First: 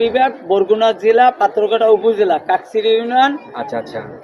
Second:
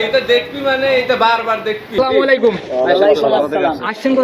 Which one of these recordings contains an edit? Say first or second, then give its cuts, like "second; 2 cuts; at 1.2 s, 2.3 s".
second; 1 cut; at 1.9 s